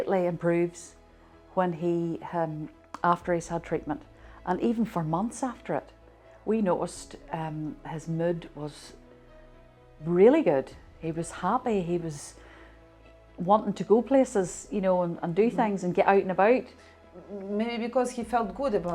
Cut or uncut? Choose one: uncut